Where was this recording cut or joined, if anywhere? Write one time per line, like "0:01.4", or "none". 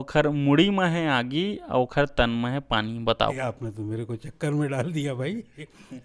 0:03.4